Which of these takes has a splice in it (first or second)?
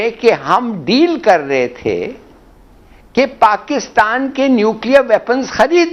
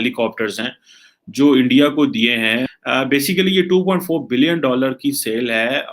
second